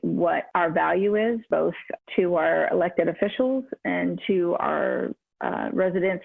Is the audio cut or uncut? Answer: cut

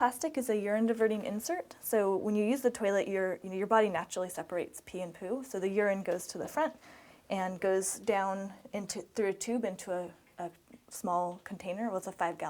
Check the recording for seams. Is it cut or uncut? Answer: uncut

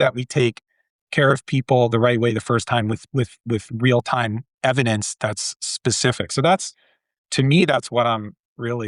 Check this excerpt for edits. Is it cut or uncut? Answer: uncut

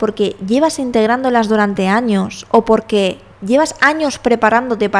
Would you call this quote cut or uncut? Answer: uncut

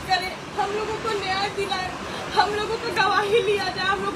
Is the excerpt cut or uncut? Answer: uncut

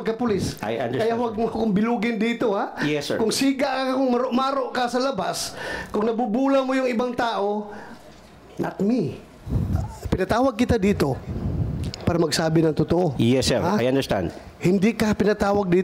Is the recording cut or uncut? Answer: cut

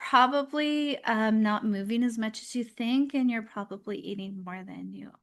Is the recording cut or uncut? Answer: uncut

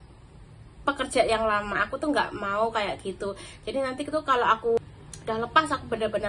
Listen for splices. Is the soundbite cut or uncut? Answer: cut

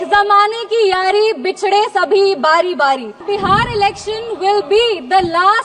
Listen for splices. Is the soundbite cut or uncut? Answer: cut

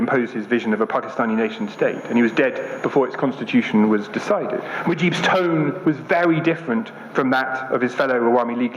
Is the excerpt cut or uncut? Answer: cut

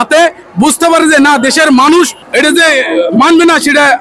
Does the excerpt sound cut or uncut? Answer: cut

